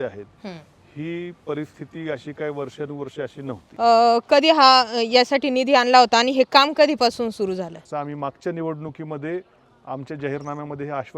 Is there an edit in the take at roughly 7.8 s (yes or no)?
yes